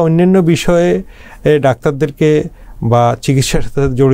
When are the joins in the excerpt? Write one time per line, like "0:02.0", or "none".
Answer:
none

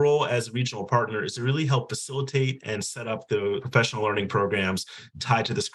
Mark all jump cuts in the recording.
none

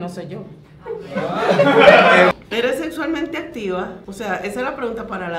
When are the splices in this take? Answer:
0:02.3
0:04.0

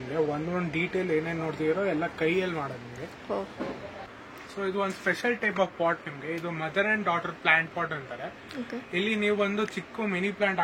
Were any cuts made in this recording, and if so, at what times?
0:04.1

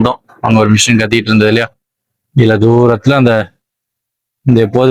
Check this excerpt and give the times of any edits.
none

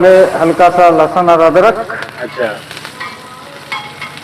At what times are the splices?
none

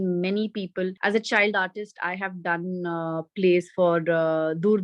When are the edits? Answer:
0:01.0

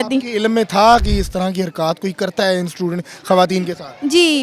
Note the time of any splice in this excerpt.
0:01.0

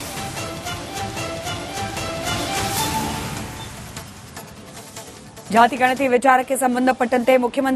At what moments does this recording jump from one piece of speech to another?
0:05.5

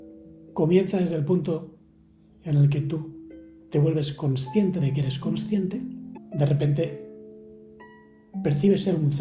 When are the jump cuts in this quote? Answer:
0:06.1

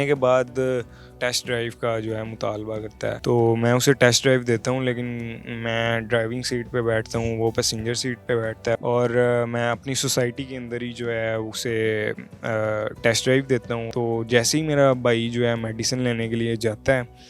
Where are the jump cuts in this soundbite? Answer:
0:01.1
0:03.2
0:08.8
0:13.9

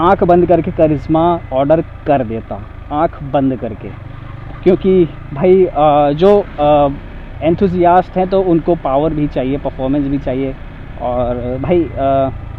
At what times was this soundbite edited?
none

